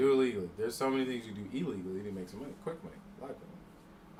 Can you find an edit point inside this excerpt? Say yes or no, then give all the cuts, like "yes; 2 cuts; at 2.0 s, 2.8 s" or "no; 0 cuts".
no; 0 cuts